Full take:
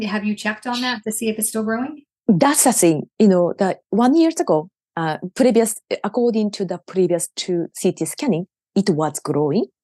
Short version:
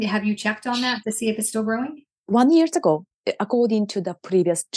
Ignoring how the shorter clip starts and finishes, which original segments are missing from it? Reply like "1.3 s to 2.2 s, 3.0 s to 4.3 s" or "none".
2.1 s to 3.8 s, 4.8 s to 5.8 s